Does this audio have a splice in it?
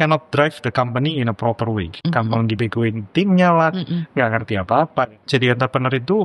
yes; 2 cuts; at 2.0 s, 5.2 s

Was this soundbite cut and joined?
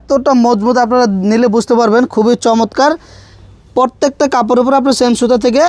no; 0 cuts

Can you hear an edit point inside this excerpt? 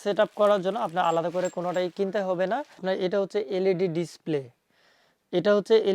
yes; 1 cut; at 2.7 s

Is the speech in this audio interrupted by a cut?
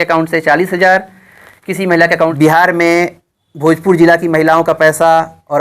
yes; 1 cut; at 2.3 s

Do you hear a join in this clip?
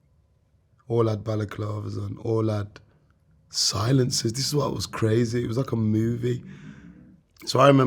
no; 0 cuts

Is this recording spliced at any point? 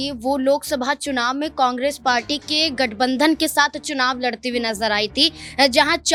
no; 0 cuts

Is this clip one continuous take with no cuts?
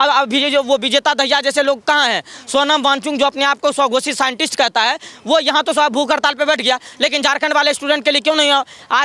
yes; 0 cuts

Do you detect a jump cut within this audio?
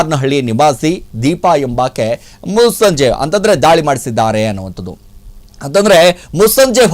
no; 0 cuts

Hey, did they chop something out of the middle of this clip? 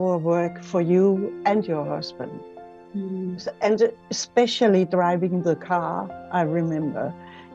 no; 0 cuts

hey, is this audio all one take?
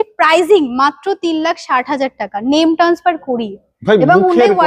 yes; 0 cuts

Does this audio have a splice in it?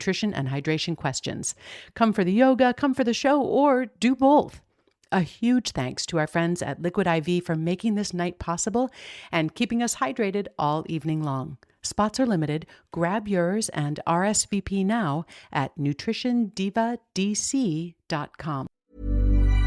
yes; 1 cut; at 18.8 s

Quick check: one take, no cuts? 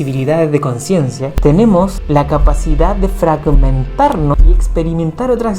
no; 3 cuts; at 1.2 s, 2.0 s, 4.4 s

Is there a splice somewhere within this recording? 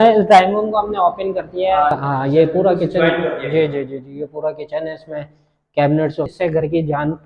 yes; 2 cuts; at 1.9 s, 6.3 s

